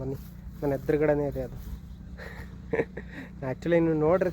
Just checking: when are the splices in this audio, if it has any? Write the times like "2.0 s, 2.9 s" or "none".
3.2 s